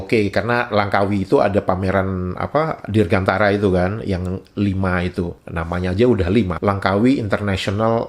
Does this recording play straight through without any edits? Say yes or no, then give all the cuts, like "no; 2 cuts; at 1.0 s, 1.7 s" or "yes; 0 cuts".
yes; 0 cuts